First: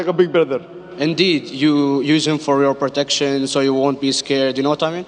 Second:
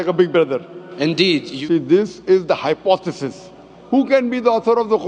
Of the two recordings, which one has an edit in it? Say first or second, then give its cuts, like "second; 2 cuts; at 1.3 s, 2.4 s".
second; 2 cuts; at 1.5 s, 3.8 s